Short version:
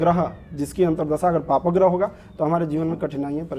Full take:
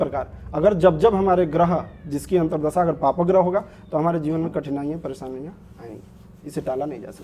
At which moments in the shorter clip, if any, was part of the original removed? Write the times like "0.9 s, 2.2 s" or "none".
none